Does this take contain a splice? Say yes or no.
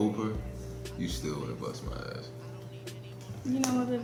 no